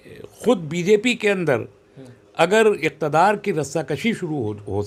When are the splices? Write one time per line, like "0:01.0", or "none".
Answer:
none